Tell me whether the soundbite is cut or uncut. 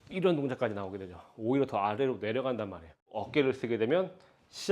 cut